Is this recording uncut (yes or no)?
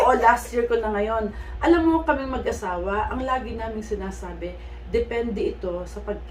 yes